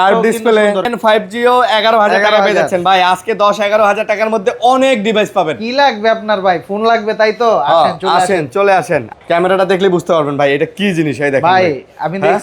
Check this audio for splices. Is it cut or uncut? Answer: cut